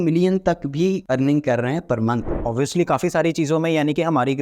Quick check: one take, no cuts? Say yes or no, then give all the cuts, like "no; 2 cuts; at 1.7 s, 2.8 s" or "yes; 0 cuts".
no; 2 cuts; at 1.0 s, 2.3 s